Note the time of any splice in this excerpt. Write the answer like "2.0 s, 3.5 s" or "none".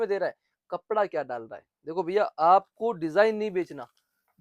none